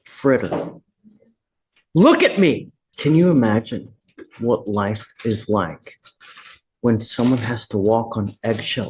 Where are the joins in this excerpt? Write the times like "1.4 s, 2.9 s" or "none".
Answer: 2.8 s